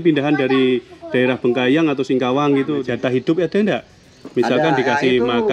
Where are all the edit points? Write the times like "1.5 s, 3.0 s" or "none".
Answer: 2.8 s